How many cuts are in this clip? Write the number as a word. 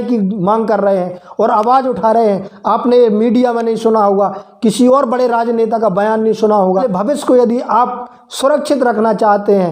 one